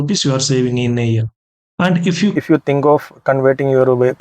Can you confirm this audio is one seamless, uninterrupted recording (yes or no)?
no